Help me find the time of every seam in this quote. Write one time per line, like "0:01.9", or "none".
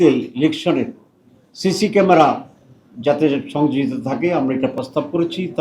none